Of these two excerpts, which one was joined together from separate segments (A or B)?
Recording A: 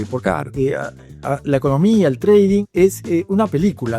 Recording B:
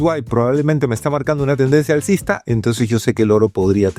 A